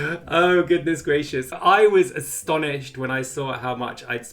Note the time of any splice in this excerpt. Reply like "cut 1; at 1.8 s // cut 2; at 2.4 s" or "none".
cut 1; at 1.6 s